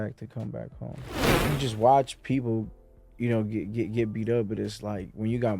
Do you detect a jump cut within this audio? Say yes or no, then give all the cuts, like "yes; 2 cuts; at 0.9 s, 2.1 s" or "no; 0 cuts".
yes; 1 cut; at 1.2 s